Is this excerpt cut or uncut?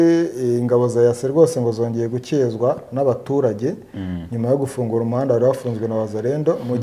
uncut